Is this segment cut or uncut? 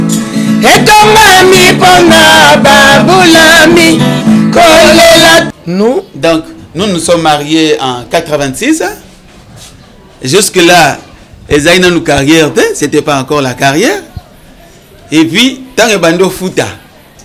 cut